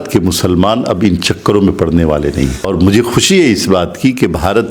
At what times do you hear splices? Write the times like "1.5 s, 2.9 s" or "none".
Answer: 2.7 s